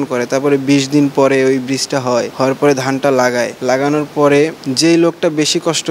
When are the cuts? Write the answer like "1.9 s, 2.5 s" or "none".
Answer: 2.3 s, 3.5 s, 4.6 s